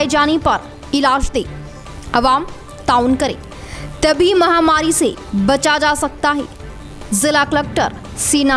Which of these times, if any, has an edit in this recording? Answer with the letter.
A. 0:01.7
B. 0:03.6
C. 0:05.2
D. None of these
D